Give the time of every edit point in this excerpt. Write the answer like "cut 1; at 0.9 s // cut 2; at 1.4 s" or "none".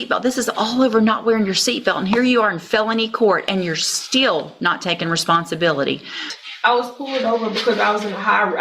cut 1; at 6.3 s